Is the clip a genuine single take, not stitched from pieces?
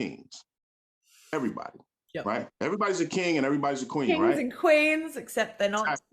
yes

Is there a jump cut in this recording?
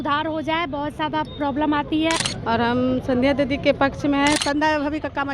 yes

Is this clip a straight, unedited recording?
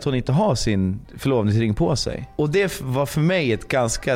no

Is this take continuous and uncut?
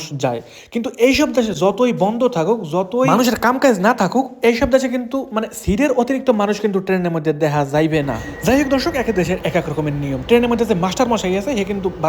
yes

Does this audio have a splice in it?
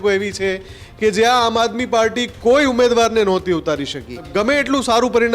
yes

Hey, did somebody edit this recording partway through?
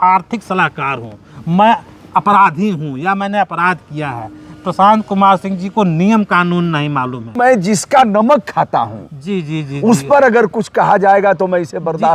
yes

